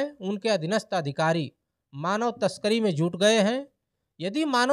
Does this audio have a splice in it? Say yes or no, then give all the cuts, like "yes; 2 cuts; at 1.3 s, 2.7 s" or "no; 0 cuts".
no; 0 cuts